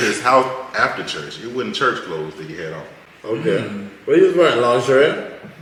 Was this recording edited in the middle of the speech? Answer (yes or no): no